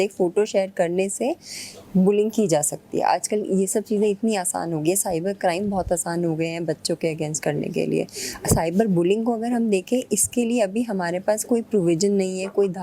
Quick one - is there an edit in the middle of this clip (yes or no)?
no